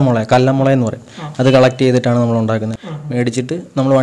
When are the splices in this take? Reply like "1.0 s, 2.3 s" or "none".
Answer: 2.7 s